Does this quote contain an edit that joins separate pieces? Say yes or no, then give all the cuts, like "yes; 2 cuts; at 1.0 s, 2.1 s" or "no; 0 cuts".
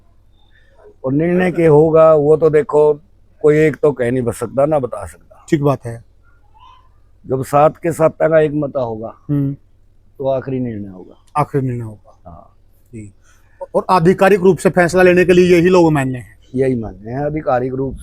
no; 0 cuts